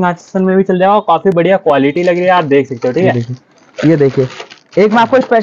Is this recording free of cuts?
yes; 0 cuts

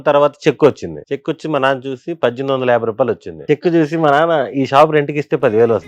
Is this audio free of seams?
no; 2 cuts; at 0.9 s, 3.5 s

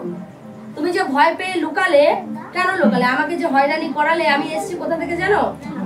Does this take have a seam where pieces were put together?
no; 0 cuts

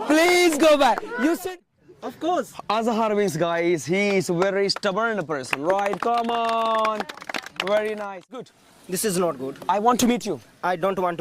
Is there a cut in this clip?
yes; 2 cuts; at 1.6 s, 8.5 s

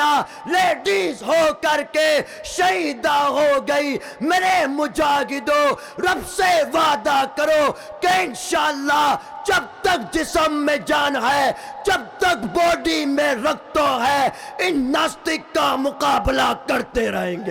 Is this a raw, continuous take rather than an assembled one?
yes; 0 cuts

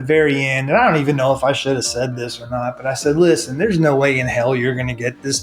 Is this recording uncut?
yes; 0 cuts

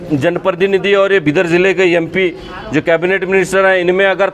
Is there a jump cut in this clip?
no; 0 cuts

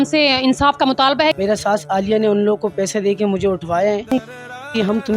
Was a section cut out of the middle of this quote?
yes; 2 cuts; at 1.4 s, 4.1 s

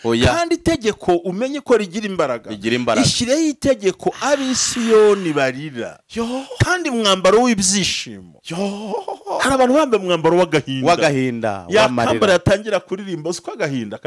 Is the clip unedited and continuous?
no; 1 cut; at 6.5 s

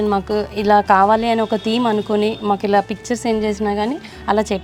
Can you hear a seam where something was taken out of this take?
no; 0 cuts

